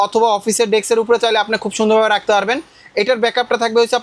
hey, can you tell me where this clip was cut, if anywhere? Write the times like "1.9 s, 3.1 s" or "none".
none